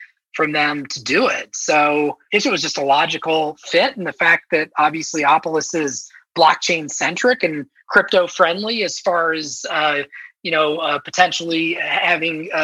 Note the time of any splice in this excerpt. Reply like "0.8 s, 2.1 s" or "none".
none